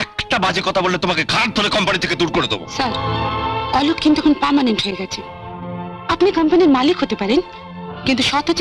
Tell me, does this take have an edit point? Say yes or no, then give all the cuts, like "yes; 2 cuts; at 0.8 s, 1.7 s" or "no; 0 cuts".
no; 0 cuts